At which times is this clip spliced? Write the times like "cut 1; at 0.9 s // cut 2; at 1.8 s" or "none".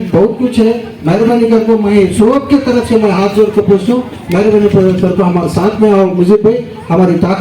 none